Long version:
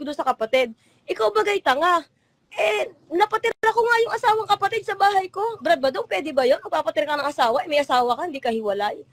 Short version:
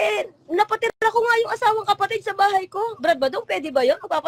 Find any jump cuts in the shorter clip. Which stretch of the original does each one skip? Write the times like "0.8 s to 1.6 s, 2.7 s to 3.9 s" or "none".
none